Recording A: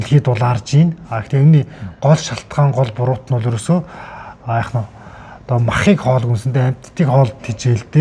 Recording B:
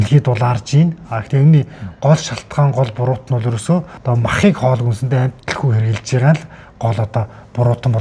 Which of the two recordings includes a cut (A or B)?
B